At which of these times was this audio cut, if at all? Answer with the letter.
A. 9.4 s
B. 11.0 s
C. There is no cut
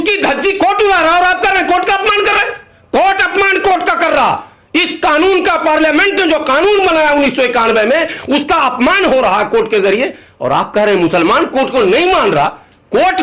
C